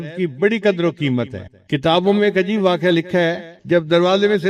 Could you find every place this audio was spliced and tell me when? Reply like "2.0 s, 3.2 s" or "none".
3.5 s